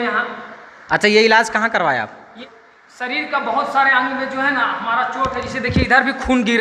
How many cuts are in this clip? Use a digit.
1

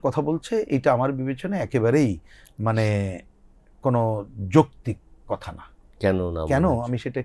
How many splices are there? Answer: 0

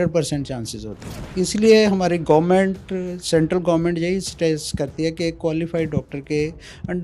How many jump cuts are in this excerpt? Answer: 1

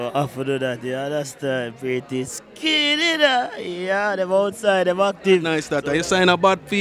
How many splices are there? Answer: 1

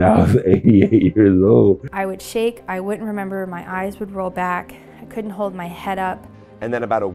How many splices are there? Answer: 2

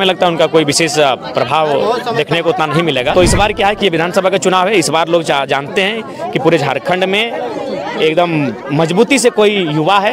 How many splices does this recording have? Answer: 1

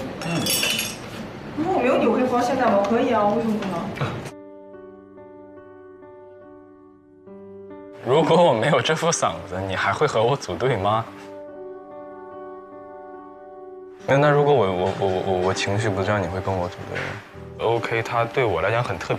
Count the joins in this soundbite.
1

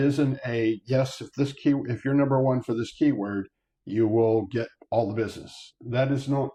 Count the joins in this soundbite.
0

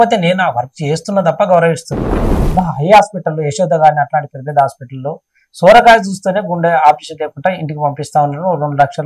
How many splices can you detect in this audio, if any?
1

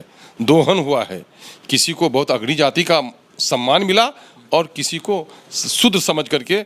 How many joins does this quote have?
0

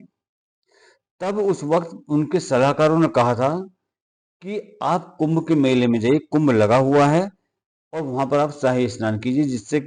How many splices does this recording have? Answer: 0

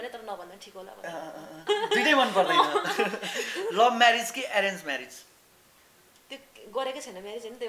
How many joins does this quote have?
1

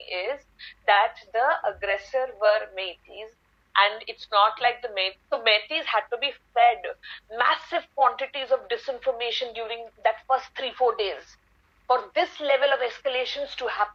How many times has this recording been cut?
0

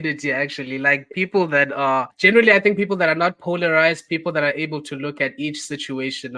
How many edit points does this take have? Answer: 1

